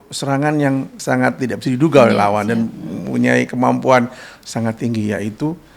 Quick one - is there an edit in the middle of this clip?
yes; 1 cut; at 0.9 s

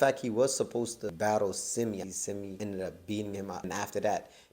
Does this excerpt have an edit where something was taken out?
yes; 3 cuts; at 1.0 s, 2.2 s, 3.6 s

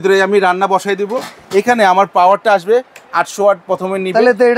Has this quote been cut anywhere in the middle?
no; 0 cuts

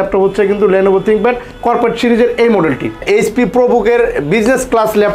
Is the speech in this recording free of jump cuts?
no; 1 cut; at 2.9 s

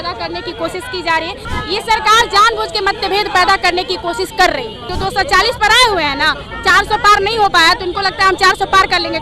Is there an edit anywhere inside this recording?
yes; 2 cuts; at 1.5 s, 4.8 s

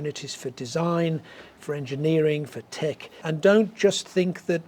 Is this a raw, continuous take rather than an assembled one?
no; 1 cut; at 3.2 s

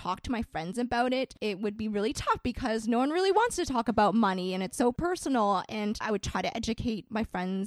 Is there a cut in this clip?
yes; 3 cuts; at 1.3 s, 5.0 s, 6.0 s

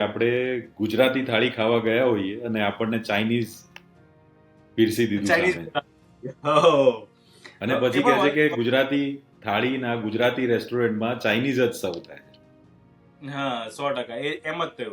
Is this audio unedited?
yes; 0 cuts

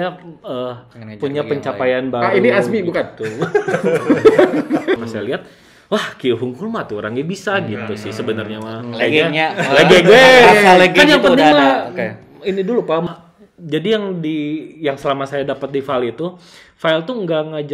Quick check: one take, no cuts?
no; 2 cuts; at 5.0 s, 13.1 s

